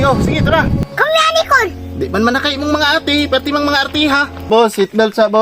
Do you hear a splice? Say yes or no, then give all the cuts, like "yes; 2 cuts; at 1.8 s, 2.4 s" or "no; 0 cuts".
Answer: yes; 1 cut; at 4.5 s